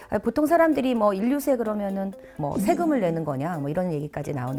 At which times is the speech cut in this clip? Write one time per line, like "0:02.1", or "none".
none